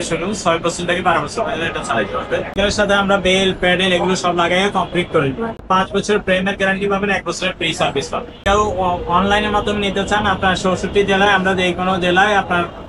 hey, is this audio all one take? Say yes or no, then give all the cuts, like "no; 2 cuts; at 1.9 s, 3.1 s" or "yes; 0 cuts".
no; 3 cuts; at 2.5 s, 5.6 s, 8.4 s